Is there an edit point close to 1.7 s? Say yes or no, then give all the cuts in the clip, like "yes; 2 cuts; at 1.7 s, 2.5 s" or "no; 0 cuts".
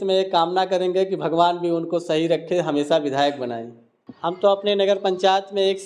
no; 1 cut; at 4.1 s